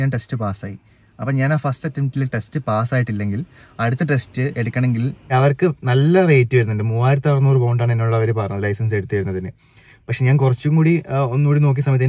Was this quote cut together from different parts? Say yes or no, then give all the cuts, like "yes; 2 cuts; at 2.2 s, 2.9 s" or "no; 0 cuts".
yes; 1 cut; at 5.3 s